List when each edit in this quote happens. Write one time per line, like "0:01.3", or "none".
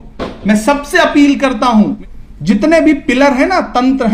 0:02.0